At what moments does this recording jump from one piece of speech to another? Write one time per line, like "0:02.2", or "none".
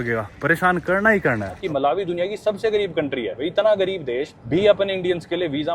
0:01.6
0:03.4
0:04.3